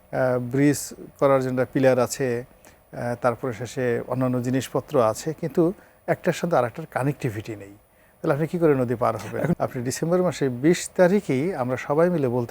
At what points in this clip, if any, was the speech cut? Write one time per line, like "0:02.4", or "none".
0:09.6